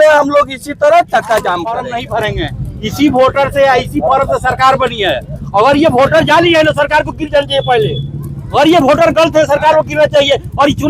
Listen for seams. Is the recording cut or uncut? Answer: cut